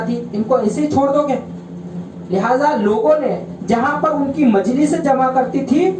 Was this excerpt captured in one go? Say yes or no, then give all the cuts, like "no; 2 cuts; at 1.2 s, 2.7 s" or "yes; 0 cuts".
yes; 0 cuts